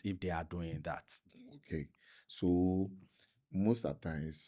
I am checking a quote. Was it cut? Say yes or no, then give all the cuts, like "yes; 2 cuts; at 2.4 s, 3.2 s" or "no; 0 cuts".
no; 0 cuts